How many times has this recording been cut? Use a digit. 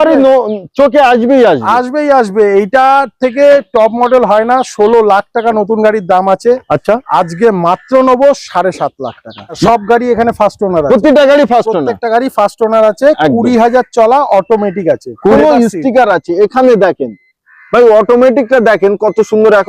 2